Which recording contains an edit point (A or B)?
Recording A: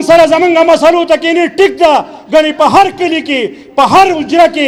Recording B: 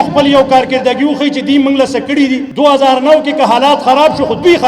B